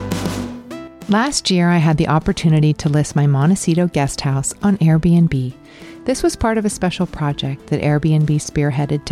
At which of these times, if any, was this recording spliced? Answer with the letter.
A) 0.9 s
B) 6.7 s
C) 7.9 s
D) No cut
A